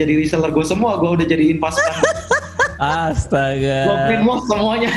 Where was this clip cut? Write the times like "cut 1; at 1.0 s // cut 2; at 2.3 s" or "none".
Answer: none